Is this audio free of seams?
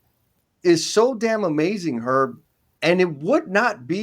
yes; 0 cuts

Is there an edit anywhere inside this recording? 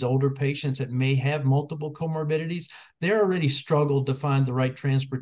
no; 0 cuts

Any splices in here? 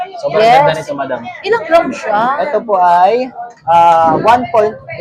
no; 0 cuts

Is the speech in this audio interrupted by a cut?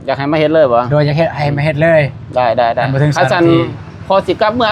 no; 0 cuts

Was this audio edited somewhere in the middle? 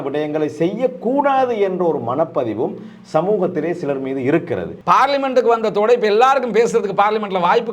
yes; 1 cut; at 4.7 s

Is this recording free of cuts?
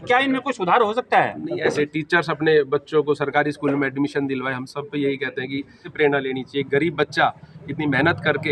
no; 2 cuts; at 1.8 s, 5.9 s

